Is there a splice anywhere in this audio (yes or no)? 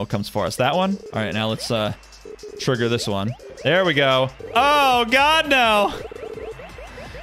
yes